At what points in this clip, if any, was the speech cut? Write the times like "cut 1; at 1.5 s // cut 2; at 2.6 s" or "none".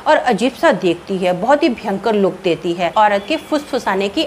cut 1; at 2.9 s